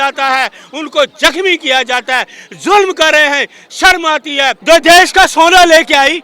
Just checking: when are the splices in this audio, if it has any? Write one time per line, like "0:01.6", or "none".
0:04.6